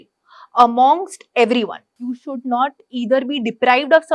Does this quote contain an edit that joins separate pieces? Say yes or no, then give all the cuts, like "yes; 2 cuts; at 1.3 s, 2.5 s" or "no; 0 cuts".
yes; 1 cut; at 1.9 s